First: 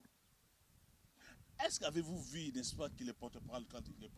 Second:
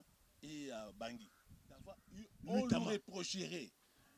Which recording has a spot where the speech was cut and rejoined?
second; 1 cut; at 2.8 s

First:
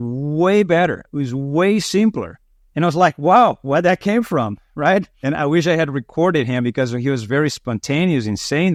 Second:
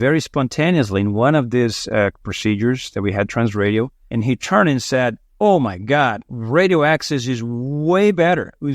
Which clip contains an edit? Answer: second; 2 cuts; at 4.0 s, 5.2 s

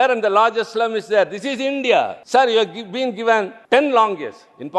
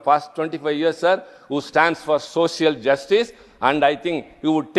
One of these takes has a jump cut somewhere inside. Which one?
first; 2 cuts; at 2.2 s, 3.6 s

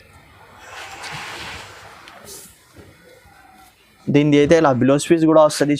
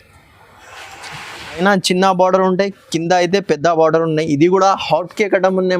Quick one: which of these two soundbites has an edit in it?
second; 1 cut; at 1.6 s

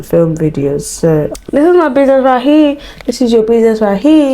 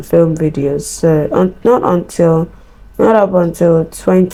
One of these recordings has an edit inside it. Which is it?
first; 1 cut; at 1.3 s

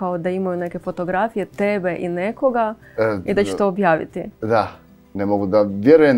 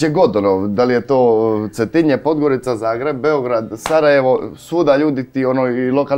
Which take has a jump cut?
first; 1 cut; at 5.1 s

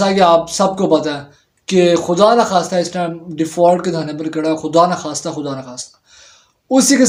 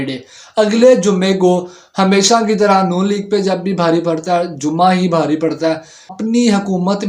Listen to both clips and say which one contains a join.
second; 1 cut; at 6.2 s

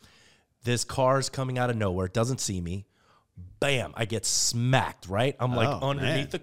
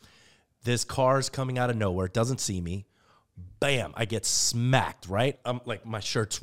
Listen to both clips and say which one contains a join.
second; 1 cut; at 5.4 s

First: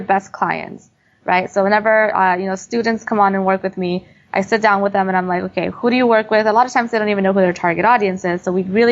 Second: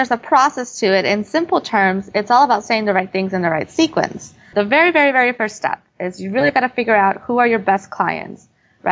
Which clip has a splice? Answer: second; 1 cut; at 4.4 s

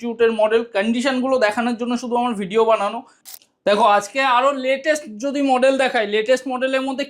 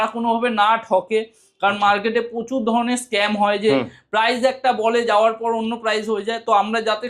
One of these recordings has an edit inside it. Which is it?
first; 1 cut; at 3.3 s

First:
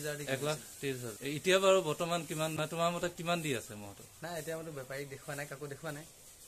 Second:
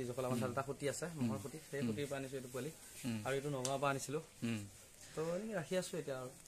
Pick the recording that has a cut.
first; 2 cuts; at 1.1 s, 2.6 s

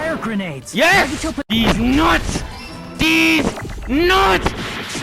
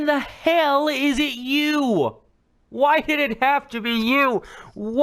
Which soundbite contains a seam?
first; 1 cut; at 1.4 s

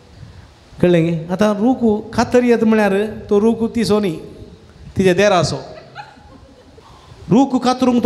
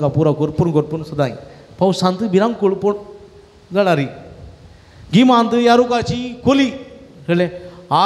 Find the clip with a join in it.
first; 1 cut; at 6.8 s

